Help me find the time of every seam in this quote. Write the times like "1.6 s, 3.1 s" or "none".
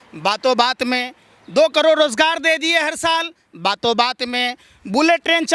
none